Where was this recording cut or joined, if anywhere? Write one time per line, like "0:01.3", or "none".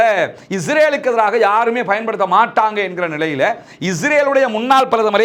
none